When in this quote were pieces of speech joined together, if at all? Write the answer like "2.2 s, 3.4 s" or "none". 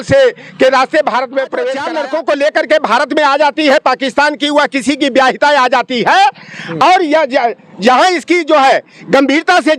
1.8 s